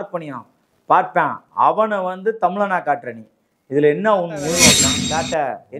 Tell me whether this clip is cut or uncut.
cut